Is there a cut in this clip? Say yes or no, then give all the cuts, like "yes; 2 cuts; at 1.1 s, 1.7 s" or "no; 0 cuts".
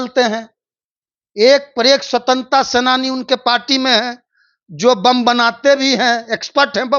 no; 0 cuts